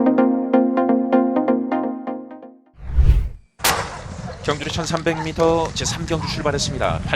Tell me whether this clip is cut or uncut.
cut